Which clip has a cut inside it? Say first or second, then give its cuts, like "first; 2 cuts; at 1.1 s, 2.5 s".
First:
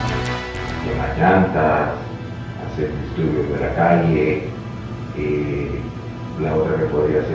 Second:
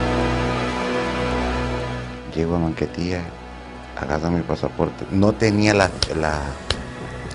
first; 1 cut; at 4.8 s